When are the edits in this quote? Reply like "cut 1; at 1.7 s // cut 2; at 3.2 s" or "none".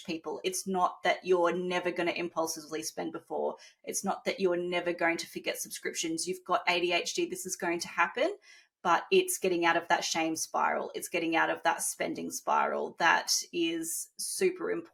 none